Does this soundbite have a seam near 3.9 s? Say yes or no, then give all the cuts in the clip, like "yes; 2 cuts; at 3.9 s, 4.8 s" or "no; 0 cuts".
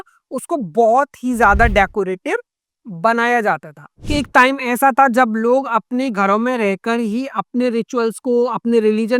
yes; 1 cut; at 3.9 s